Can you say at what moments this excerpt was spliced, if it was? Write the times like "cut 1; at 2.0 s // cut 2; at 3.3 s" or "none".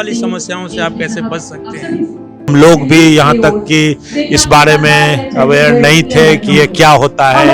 cut 1; at 2.5 s